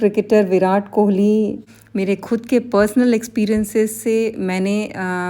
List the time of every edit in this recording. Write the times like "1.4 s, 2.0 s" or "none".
1.7 s